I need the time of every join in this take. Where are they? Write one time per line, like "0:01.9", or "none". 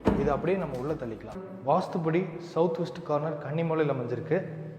0:01.4